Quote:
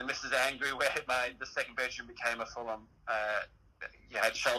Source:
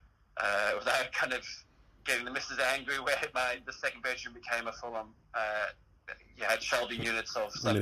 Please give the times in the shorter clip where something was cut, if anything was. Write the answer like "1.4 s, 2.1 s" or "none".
none

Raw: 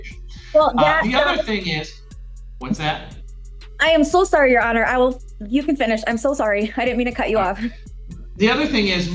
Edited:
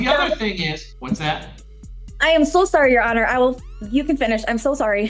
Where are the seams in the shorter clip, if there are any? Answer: 0.9 s

